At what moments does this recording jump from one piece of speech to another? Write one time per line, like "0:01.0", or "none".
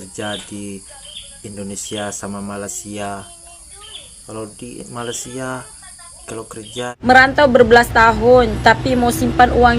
0:06.9